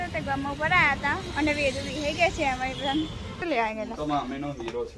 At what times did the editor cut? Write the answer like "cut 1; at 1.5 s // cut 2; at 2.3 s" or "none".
cut 1; at 3.4 s